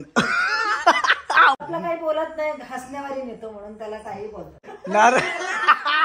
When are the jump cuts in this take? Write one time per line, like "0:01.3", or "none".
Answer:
0:01.6
0:04.7